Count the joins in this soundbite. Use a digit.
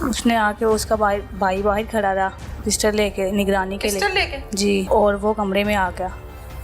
1